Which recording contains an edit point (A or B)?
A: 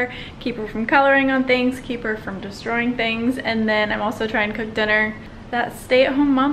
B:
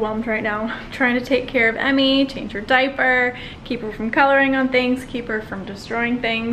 A